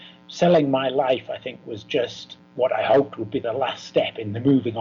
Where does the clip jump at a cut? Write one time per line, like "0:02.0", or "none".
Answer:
0:02.4